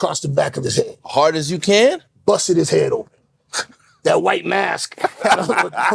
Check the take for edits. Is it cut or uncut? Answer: uncut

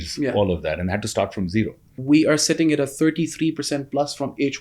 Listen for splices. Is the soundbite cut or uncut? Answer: cut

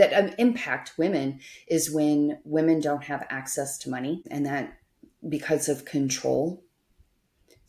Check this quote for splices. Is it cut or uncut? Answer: cut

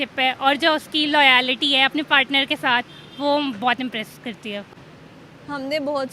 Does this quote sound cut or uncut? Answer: cut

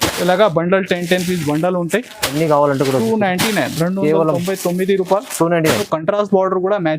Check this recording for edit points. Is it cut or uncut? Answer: cut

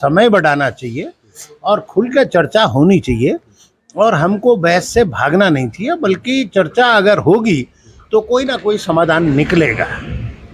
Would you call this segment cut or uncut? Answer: uncut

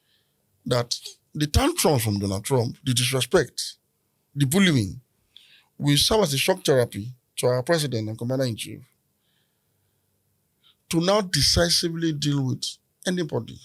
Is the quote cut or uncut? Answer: uncut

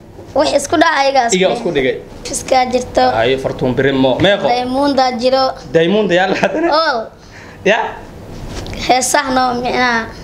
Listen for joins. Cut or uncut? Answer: cut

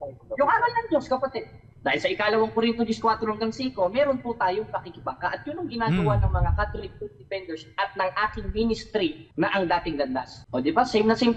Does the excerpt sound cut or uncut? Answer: cut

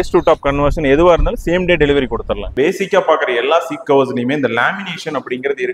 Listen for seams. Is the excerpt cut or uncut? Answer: cut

